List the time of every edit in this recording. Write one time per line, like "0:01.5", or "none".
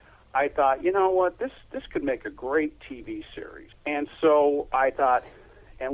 0:03.7